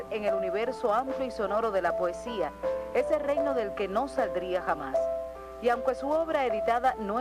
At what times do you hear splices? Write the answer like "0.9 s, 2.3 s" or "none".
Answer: 2.0 s